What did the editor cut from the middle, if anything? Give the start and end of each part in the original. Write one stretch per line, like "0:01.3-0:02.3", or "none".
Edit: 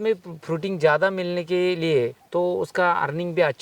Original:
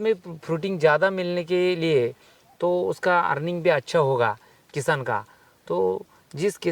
0:02.2-0:02.5